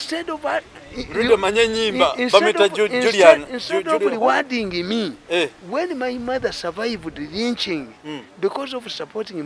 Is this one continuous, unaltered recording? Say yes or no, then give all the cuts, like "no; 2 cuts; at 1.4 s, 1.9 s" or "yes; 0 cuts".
yes; 0 cuts